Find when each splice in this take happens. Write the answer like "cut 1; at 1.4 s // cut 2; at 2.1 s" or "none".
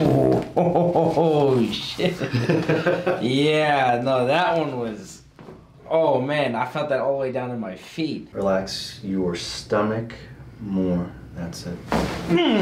cut 1; at 8.2 s